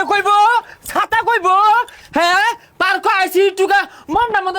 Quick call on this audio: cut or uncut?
uncut